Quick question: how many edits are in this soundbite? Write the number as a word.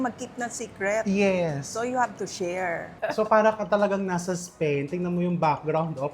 one